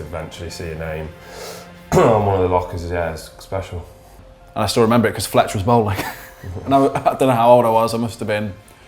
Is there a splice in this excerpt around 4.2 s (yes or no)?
yes